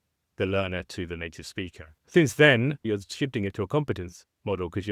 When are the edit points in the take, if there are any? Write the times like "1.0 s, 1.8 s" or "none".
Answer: 2.0 s, 2.9 s